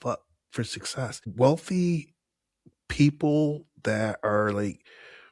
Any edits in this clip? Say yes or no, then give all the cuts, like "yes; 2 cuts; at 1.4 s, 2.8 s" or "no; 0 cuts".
yes; 1 cut; at 1.3 s